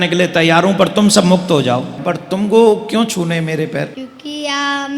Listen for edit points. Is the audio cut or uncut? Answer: cut